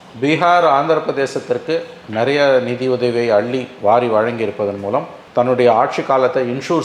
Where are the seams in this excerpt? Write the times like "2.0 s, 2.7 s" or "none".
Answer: none